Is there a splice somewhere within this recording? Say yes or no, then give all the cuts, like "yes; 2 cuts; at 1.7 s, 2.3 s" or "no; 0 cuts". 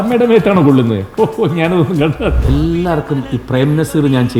yes; 1 cut; at 2.4 s